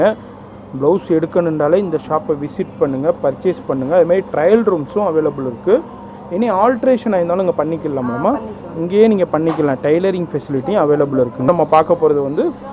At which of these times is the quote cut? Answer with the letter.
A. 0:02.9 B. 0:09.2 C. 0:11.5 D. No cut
C